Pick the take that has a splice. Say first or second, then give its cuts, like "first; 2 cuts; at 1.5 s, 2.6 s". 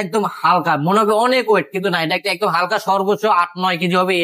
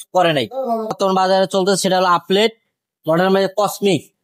second; 1 cut; at 0.9 s